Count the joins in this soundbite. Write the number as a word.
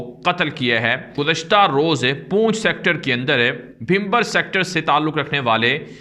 one